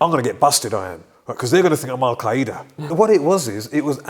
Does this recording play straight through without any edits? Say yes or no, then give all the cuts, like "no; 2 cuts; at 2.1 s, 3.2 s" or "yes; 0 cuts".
no; 1 cut; at 2.9 s